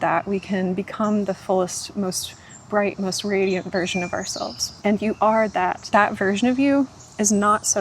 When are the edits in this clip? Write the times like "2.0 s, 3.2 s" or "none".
4.6 s, 5.8 s

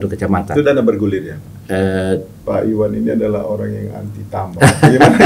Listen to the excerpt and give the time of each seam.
2.3 s

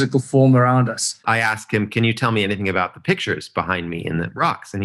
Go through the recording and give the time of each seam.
1.1 s

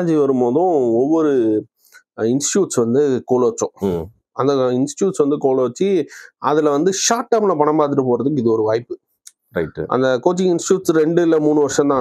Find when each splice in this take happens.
none

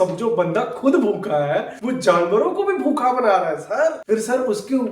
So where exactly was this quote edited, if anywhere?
4.0 s

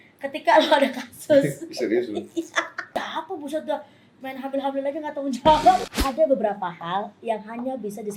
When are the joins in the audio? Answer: 2.8 s, 5.9 s

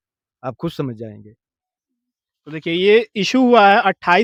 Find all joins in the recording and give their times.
none

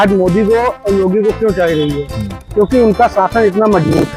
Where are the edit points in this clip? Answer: none

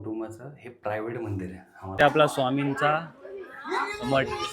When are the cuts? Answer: 2.0 s

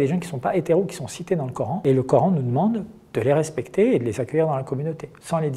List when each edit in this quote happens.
1.8 s

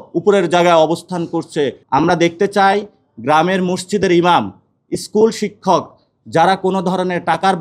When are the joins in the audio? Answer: 1.8 s

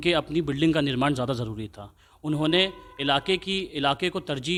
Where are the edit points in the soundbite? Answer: none

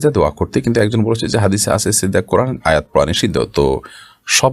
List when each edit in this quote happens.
none

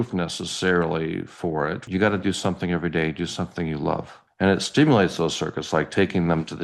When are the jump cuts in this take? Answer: 1.8 s, 4.2 s

